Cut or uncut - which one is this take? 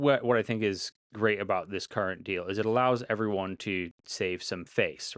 uncut